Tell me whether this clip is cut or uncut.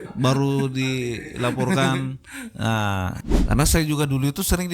cut